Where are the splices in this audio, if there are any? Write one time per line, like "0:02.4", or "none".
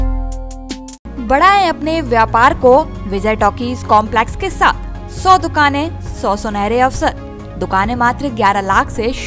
none